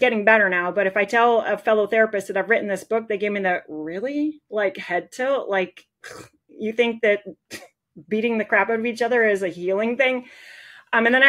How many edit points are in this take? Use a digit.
0